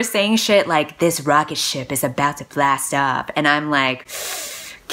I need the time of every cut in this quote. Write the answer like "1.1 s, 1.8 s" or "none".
none